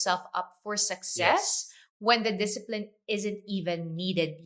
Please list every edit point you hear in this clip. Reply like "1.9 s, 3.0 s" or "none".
none